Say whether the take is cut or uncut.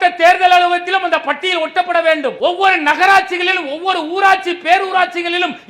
cut